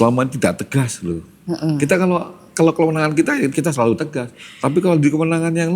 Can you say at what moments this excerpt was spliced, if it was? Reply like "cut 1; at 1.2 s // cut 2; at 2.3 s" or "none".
cut 1; at 3.5 s